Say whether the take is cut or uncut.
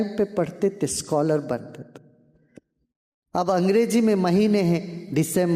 uncut